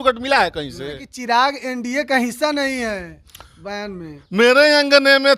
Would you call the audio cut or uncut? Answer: cut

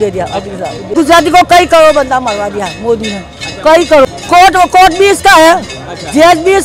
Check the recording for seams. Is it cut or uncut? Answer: cut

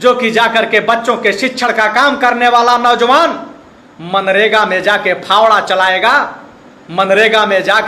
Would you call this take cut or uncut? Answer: uncut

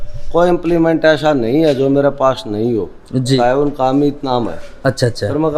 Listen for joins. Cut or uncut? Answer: cut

